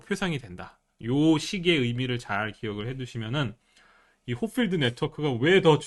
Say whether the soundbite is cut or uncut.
uncut